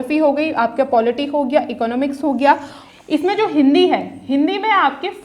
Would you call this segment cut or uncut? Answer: cut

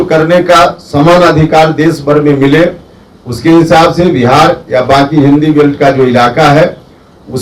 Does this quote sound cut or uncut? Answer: uncut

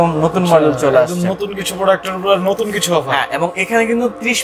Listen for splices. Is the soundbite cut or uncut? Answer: uncut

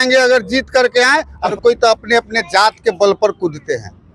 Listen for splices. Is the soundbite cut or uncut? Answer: cut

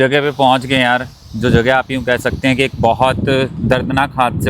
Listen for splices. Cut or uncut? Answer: uncut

